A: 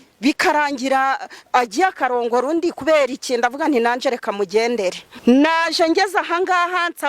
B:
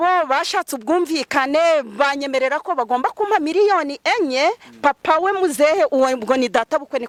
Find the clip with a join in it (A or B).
A